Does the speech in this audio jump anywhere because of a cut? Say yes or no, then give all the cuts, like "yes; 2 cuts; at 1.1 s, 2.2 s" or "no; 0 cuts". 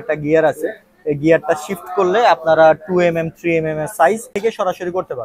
yes; 1 cut; at 4.3 s